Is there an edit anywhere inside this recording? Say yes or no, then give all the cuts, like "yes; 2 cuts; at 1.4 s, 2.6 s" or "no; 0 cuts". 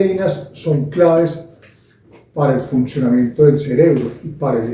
no; 0 cuts